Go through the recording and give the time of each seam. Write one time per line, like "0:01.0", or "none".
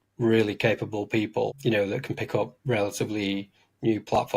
0:01.6

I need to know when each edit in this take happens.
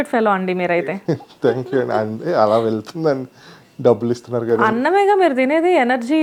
none

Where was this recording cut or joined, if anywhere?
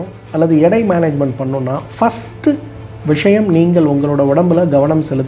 none

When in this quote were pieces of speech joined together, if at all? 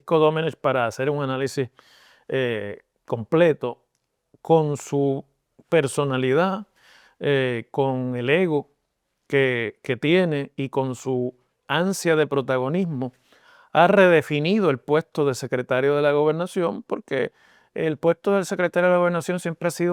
none

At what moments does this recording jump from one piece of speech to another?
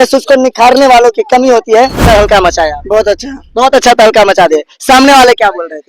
0:02.1

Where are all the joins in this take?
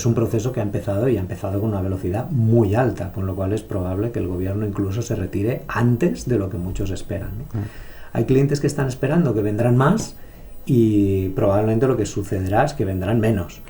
none

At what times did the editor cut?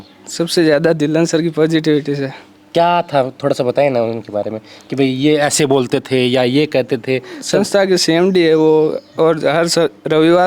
none

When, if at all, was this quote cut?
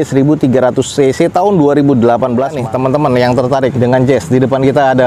0:02.6

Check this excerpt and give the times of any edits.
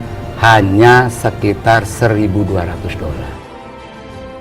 0:03.5

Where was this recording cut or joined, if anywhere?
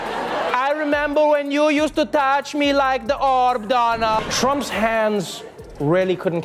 0:04.3

